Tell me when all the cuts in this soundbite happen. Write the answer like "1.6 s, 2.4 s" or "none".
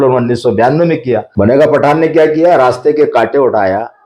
1.3 s